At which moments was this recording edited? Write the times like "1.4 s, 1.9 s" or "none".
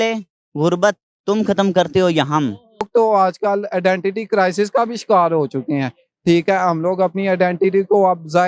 2.9 s